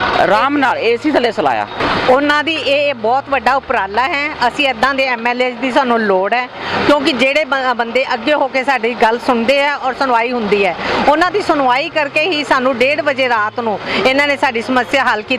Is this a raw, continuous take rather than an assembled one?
no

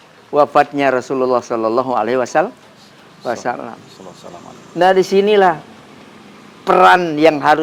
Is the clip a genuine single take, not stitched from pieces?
yes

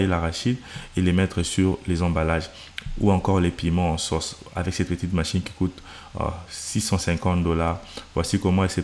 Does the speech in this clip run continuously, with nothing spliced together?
yes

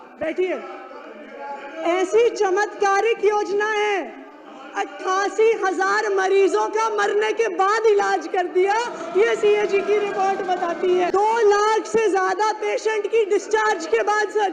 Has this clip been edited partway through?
yes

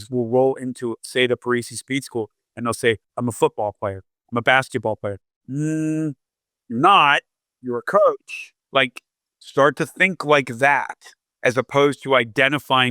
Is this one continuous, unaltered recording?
no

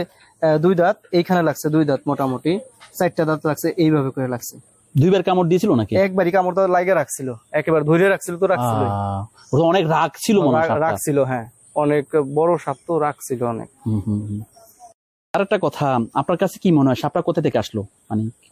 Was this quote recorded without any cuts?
yes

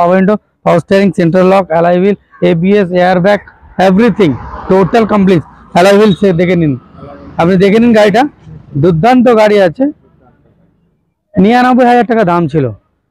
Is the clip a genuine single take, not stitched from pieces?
yes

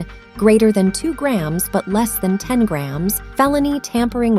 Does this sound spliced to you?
yes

